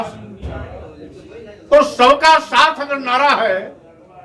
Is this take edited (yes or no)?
no